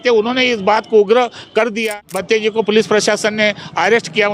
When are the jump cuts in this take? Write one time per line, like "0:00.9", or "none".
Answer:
0:01.9